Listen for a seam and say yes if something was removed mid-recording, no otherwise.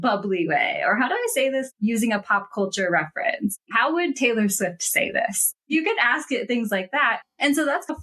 yes